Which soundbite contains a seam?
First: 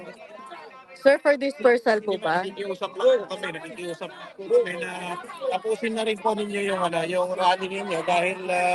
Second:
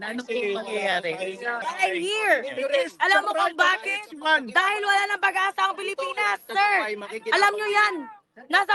second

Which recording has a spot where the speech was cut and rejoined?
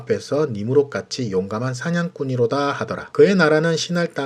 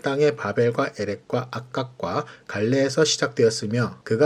first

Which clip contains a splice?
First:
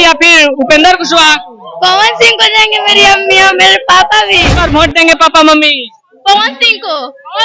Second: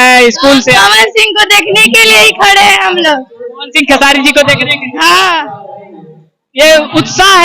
first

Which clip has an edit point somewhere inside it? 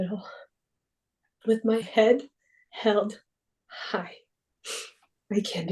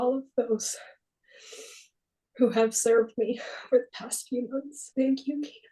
second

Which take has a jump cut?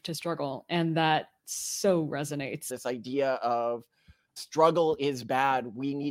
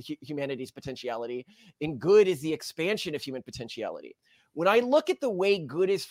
first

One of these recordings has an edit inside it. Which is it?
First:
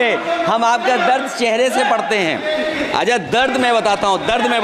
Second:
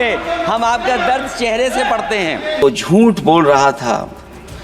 second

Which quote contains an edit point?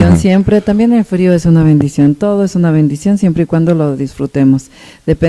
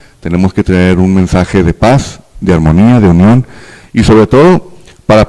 second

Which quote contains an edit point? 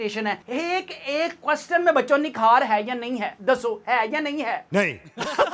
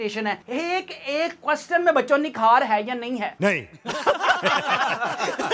second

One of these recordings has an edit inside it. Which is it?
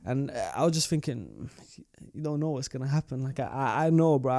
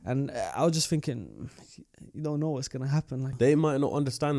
second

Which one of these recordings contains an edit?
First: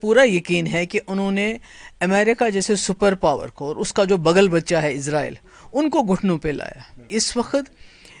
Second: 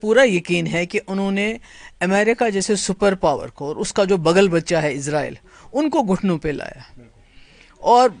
first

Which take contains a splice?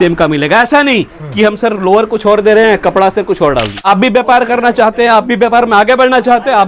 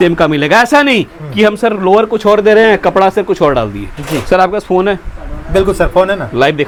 first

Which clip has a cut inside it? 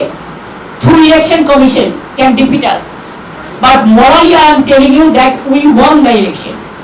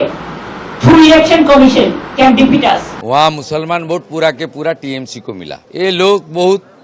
second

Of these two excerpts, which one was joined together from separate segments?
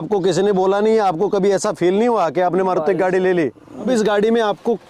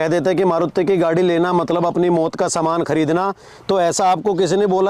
first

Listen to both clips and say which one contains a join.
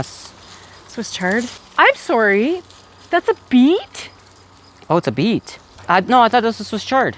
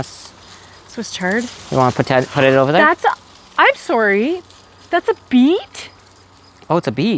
first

